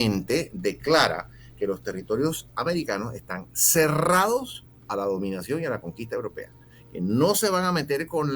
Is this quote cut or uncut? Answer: uncut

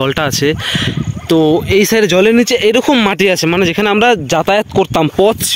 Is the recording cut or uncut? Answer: uncut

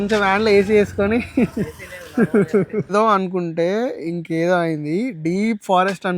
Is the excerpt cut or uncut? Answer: cut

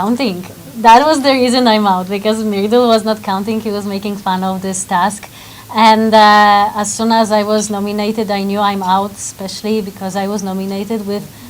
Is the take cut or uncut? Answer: uncut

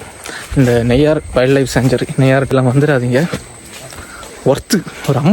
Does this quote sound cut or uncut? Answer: cut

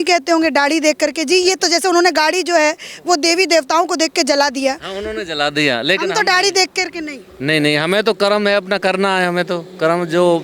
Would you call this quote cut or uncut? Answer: uncut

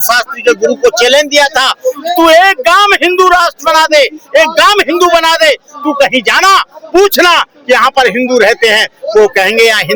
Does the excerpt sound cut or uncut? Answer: uncut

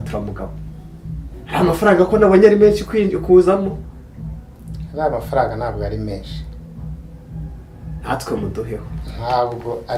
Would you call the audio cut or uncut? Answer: uncut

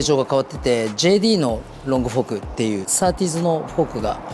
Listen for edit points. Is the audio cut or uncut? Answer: uncut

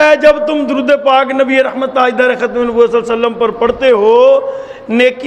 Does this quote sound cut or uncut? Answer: uncut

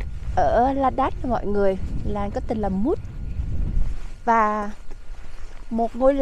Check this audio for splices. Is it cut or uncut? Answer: uncut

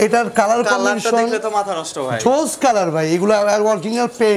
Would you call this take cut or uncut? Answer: uncut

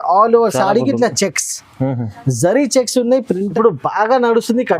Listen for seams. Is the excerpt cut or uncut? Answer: cut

